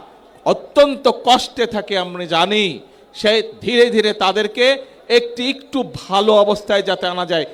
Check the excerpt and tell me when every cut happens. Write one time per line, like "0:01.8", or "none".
none